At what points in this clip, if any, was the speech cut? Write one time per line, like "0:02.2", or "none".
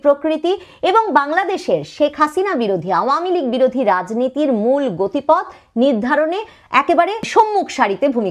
0:07.3